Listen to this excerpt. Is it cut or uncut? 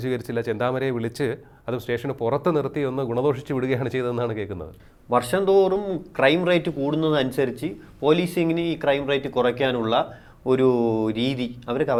uncut